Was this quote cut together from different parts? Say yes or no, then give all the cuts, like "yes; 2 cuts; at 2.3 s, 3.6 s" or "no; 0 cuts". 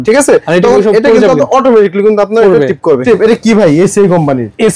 yes; 1 cut; at 3.0 s